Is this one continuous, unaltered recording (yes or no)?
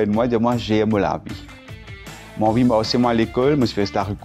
yes